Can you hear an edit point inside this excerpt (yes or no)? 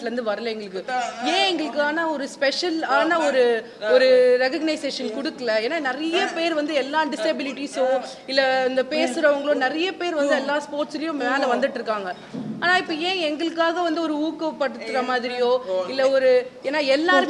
no